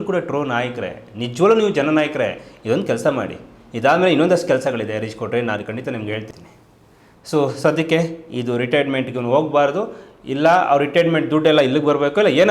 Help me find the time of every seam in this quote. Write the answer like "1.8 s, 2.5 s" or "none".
6.3 s